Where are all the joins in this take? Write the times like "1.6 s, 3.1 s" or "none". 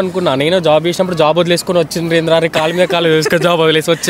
none